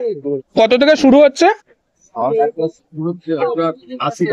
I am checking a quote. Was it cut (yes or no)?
no